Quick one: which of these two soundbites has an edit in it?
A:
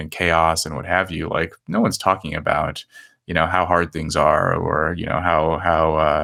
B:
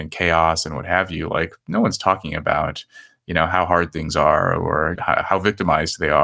B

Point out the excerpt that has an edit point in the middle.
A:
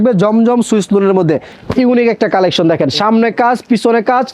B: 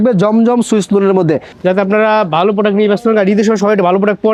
A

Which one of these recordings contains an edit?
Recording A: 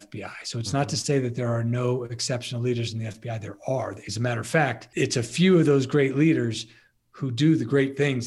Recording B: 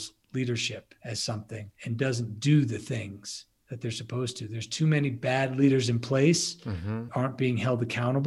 B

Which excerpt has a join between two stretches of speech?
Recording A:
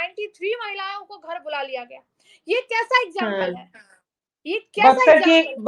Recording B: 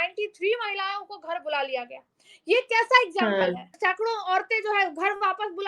B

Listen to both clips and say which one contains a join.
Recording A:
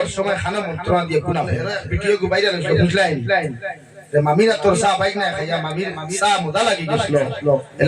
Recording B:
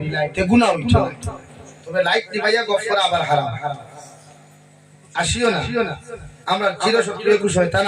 A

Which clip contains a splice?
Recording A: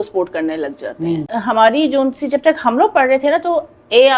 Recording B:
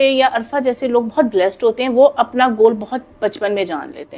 A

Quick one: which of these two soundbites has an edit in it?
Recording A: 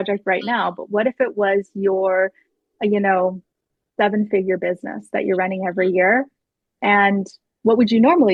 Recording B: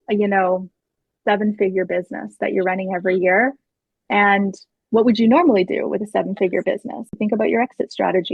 B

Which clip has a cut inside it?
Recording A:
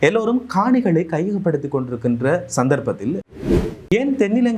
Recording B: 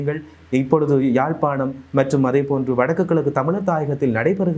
A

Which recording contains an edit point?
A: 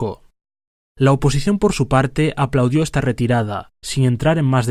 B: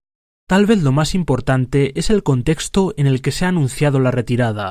B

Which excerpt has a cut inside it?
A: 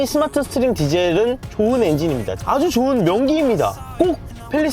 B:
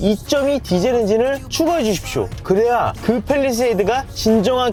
A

